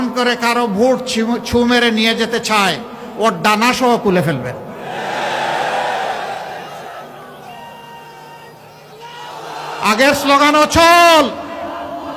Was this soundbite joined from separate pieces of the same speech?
no; 0 cuts

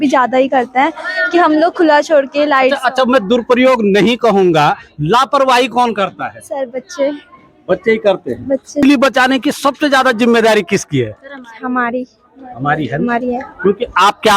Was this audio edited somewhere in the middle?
yes; 1 cut; at 8.8 s

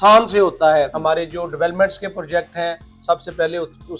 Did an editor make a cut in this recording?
yes; 1 cut; at 0.9 s

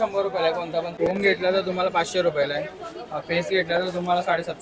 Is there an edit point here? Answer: yes; 1 cut; at 0.9 s

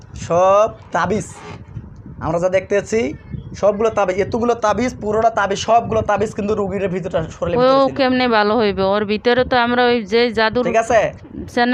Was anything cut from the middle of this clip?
no; 0 cuts

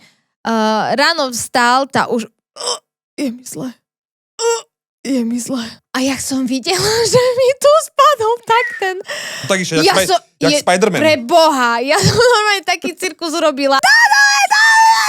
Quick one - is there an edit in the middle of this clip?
yes; 2 cuts; at 5.8 s, 13.8 s

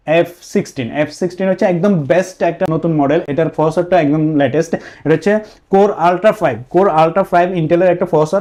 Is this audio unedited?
yes; 0 cuts

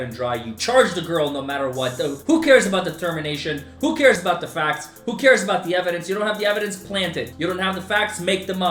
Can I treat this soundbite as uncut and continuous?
yes; 0 cuts

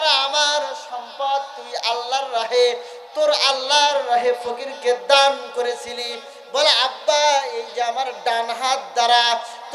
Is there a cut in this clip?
no; 0 cuts

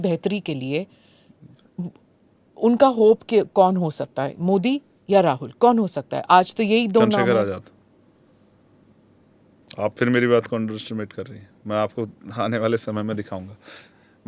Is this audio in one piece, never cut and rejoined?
yes; 0 cuts

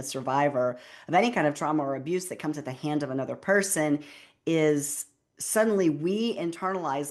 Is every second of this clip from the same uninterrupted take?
yes; 0 cuts

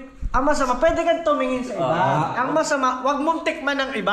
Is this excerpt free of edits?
yes; 0 cuts

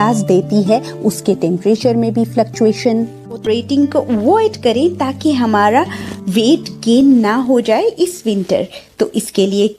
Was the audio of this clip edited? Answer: yes; 1 cut; at 3.4 s

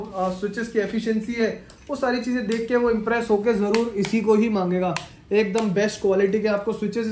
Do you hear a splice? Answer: no; 0 cuts

